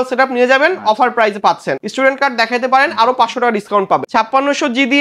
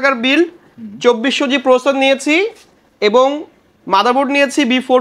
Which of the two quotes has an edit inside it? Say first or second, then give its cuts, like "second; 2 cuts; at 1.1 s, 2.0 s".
first; 2 cuts; at 1.7 s, 4.1 s